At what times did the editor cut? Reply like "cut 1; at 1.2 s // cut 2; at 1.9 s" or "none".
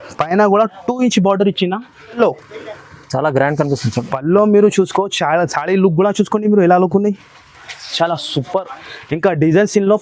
cut 1; at 2.1 s